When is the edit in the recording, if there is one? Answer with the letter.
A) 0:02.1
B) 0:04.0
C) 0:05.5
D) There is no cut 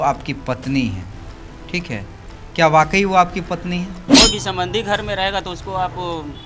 B